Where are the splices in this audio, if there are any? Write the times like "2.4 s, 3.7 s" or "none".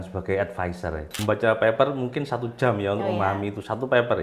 1.1 s